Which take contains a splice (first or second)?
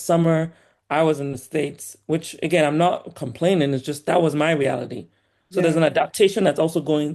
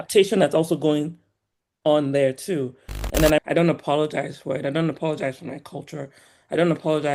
second